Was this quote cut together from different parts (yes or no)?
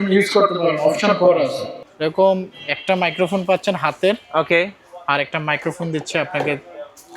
yes